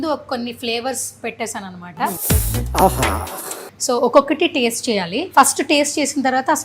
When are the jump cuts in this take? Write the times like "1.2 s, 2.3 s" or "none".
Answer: 2.2 s, 3.7 s, 5.2 s